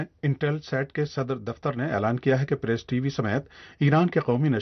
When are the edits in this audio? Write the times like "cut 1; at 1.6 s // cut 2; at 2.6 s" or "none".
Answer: none